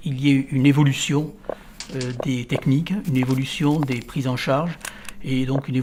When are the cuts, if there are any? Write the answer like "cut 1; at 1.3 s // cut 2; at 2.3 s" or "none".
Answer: none